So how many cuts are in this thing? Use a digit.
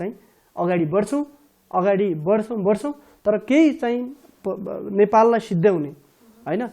0